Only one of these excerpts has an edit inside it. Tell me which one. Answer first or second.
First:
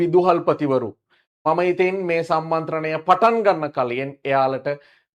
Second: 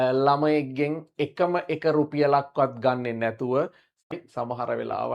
second